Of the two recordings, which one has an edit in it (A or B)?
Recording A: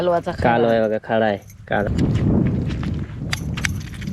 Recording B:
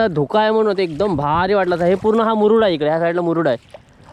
A